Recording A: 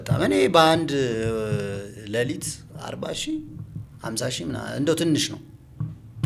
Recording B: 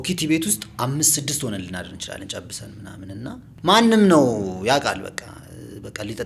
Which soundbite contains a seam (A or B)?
B